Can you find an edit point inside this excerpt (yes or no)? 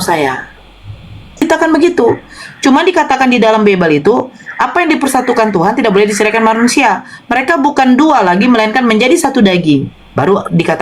yes